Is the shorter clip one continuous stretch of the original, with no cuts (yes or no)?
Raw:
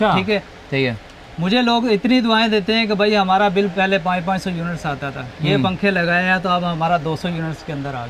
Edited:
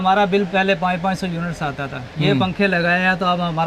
yes